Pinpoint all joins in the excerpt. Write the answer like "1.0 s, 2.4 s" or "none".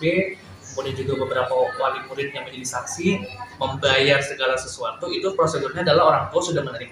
3.4 s